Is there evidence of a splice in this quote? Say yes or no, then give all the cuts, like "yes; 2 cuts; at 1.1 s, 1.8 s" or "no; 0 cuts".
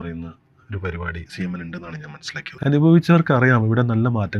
yes; 1 cut; at 2.6 s